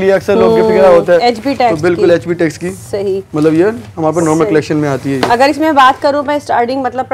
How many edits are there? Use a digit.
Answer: 0